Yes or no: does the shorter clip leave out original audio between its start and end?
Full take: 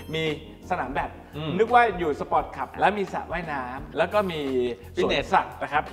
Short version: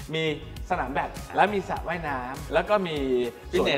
yes